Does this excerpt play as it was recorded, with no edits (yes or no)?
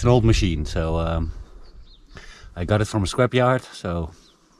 yes